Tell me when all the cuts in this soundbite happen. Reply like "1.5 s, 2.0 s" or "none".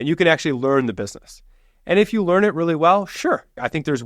none